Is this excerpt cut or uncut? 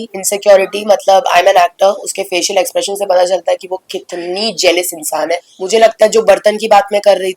cut